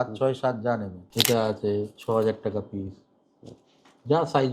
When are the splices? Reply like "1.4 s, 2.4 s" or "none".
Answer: 1.0 s